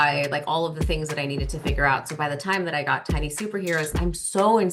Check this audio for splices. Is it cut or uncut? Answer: uncut